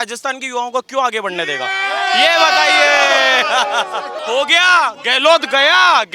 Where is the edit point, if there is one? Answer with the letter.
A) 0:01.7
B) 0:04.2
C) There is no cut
B